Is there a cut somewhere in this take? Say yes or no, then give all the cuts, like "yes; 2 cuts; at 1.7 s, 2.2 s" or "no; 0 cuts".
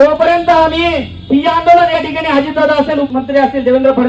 yes; 1 cut; at 3.1 s